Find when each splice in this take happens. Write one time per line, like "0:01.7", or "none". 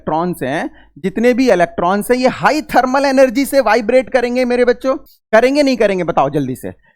0:05.1